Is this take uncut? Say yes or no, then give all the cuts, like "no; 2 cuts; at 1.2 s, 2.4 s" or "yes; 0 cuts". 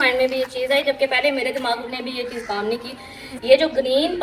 yes; 0 cuts